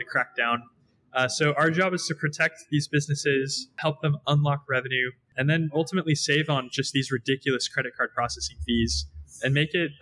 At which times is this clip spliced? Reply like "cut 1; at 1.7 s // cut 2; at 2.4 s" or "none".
cut 1; at 3.8 s // cut 2; at 5.3 s